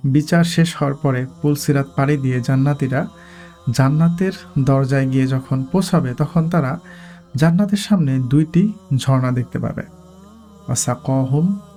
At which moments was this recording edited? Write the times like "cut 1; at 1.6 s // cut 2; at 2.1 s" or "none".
none